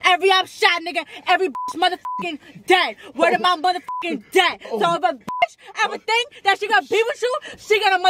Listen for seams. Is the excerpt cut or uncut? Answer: uncut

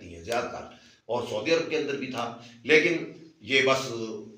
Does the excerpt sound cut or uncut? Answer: uncut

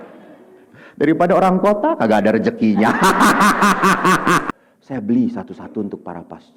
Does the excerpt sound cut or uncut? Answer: cut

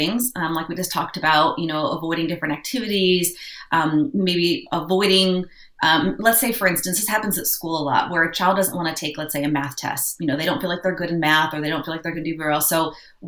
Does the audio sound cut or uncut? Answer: uncut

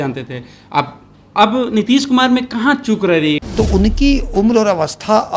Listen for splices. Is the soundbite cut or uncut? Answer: cut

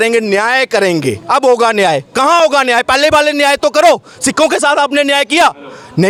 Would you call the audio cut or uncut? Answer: uncut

